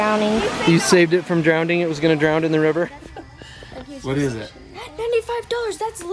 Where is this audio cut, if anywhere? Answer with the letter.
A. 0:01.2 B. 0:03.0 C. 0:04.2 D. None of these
B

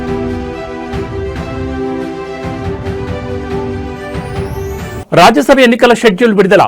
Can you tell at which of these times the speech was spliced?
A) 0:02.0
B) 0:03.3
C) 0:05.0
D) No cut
C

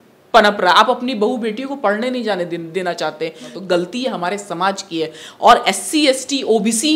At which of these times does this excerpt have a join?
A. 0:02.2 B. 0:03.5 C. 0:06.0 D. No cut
B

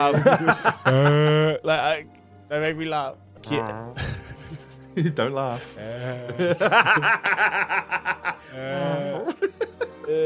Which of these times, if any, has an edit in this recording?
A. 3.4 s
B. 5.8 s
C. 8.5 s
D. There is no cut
A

